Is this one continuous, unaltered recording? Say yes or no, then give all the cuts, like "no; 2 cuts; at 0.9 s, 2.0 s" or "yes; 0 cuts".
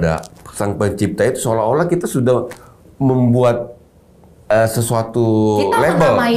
yes; 0 cuts